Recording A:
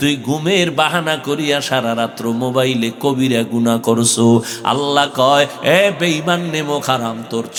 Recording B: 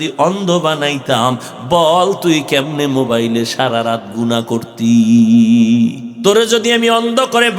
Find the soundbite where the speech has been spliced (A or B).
B